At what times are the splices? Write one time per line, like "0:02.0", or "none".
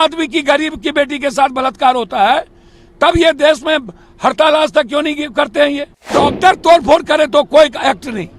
0:06.1

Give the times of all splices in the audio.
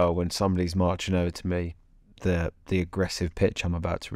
none

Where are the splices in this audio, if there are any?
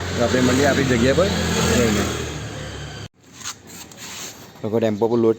0:03.1

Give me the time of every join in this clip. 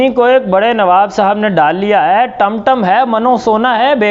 none

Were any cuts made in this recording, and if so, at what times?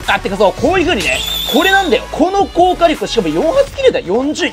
none

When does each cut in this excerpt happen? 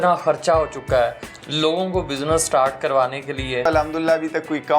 0:03.6

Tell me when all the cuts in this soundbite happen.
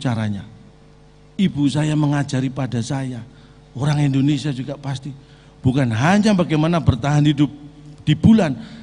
none

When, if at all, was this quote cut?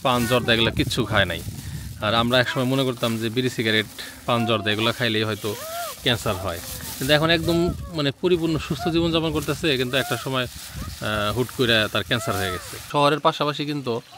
0:12.8

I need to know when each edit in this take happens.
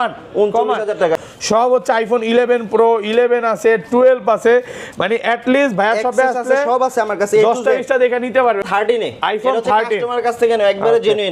0:01.2
0:08.6

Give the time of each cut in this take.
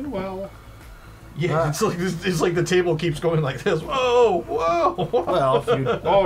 none

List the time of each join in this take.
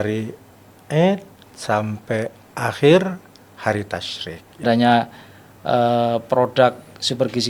0:04.6

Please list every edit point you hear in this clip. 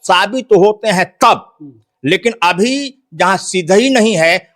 none

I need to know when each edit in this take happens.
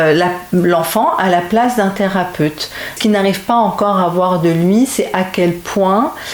0:02.9

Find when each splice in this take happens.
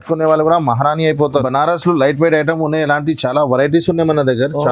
0:01.4

